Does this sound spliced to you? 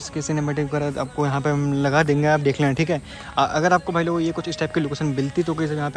no; 0 cuts

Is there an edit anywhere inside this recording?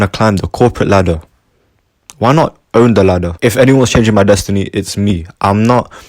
yes; 1 cut; at 3.3 s

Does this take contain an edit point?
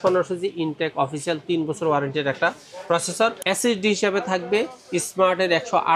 yes; 1 cut; at 3.4 s

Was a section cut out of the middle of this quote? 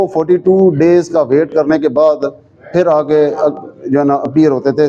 no; 0 cuts

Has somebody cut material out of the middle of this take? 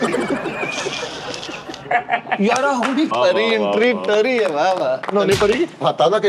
yes; 1 cut; at 3.1 s

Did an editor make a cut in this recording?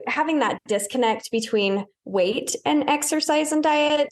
yes; 1 cut; at 2.0 s

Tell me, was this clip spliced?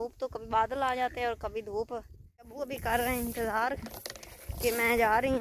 yes; 1 cut; at 2.6 s

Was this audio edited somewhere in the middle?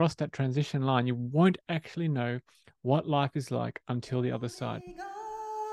yes; 1 cut; at 4.8 s

